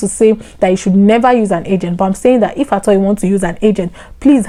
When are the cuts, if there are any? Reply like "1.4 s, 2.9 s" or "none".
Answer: none